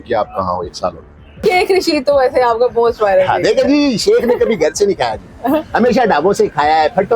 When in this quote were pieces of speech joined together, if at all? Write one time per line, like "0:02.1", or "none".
0:01.4